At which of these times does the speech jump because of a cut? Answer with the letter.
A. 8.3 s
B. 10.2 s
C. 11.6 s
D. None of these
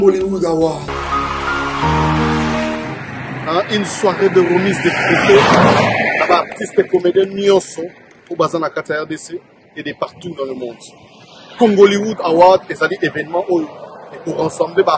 D